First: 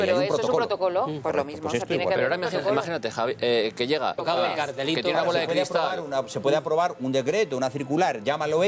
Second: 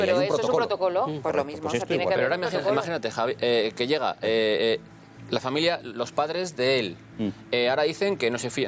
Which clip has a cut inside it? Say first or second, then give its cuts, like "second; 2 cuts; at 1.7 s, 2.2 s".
second; 1 cut; at 4.2 s